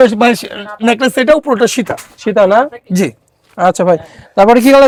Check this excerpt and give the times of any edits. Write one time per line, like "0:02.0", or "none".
none